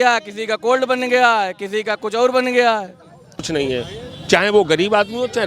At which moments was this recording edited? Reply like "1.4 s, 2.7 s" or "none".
3.5 s